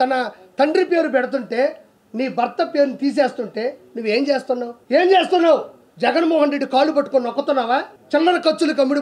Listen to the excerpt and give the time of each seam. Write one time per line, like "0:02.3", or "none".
0:04.8
0:08.0